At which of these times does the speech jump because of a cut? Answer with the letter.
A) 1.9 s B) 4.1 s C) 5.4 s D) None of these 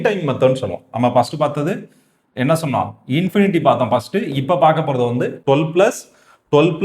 C